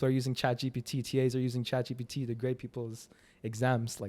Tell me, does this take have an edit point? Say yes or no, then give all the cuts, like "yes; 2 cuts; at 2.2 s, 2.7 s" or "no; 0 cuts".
no; 0 cuts